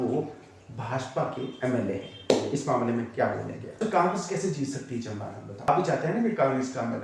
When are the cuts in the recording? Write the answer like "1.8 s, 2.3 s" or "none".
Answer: 3.8 s, 5.7 s